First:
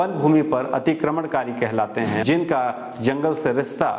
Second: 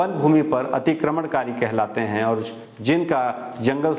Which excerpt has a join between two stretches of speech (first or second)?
first